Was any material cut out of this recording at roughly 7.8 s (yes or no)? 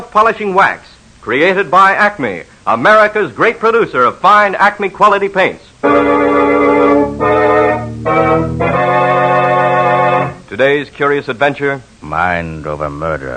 no